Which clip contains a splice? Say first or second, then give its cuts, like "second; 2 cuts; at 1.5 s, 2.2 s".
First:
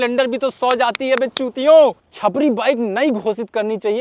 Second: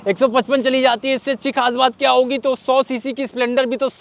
first; 1 cut; at 2.1 s